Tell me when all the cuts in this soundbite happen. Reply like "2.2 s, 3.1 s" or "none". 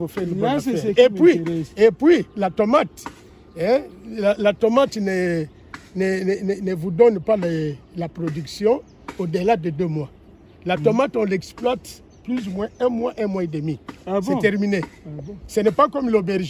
none